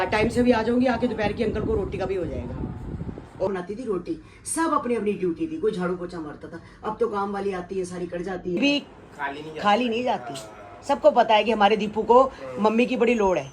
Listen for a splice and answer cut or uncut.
cut